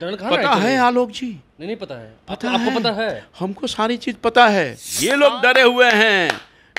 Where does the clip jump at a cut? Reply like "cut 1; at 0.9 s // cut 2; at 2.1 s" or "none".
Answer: cut 1; at 4.9 s